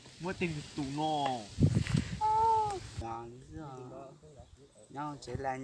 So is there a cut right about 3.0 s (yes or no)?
yes